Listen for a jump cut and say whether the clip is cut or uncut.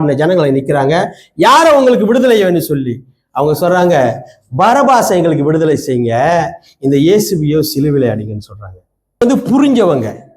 cut